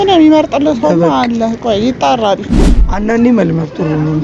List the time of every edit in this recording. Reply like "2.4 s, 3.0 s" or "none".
2.8 s